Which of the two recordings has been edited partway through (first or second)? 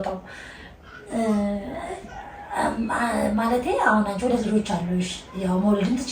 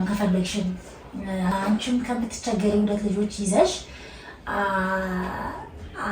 second